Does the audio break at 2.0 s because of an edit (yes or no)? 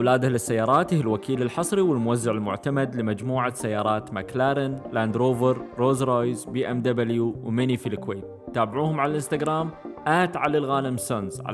no